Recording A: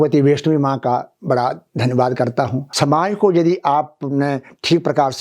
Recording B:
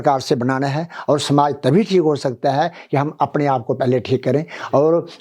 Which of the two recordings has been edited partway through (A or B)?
A